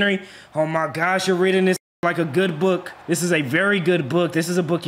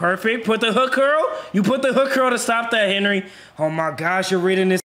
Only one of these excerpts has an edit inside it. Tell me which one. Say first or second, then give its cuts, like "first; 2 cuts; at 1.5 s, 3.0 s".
first; 1 cut; at 2.9 s